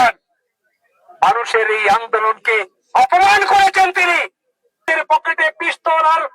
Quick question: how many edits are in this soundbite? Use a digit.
1